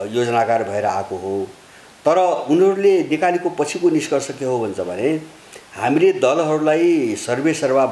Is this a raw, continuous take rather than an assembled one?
yes; 0 cuts

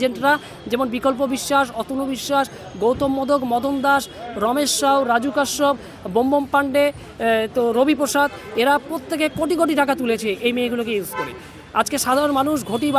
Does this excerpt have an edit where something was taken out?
no; 0 cuts

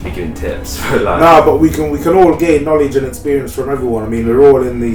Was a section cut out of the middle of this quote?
no; 0 cuts

